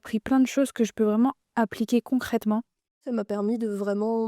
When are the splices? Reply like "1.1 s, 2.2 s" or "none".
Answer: 2.8 s